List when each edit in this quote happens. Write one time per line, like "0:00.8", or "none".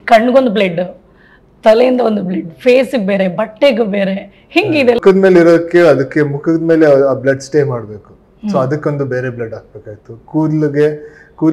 0:05.0